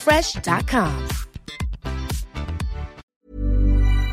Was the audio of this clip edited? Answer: yes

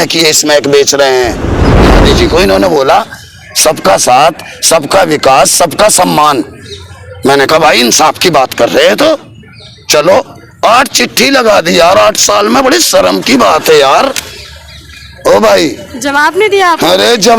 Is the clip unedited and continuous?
no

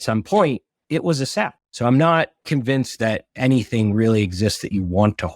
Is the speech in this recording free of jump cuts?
no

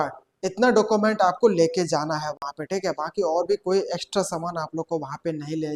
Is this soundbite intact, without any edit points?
yes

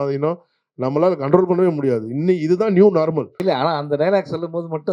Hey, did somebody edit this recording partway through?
yes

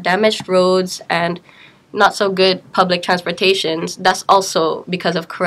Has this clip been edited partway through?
no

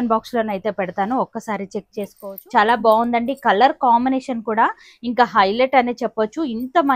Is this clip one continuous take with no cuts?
no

